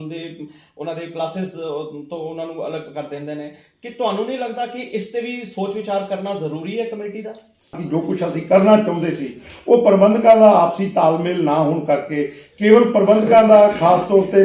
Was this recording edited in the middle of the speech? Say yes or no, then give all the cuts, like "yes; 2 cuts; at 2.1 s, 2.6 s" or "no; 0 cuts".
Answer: yes; 1 cut; at 7.8 s